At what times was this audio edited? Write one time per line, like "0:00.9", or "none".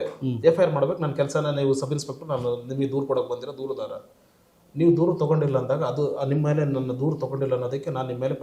none